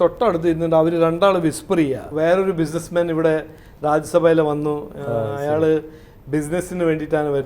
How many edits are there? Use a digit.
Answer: 1